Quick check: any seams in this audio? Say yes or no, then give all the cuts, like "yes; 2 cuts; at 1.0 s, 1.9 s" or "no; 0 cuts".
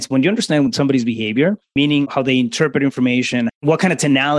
yes; 2 cuts; at 1.7 s, 3.5 s